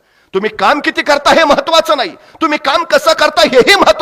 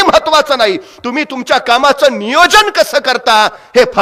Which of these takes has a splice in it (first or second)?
first